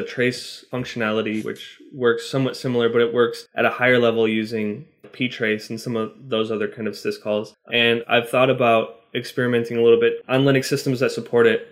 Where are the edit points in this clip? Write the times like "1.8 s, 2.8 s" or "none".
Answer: 1.5 s, 3.4 s, 7.6 s, 10.2 s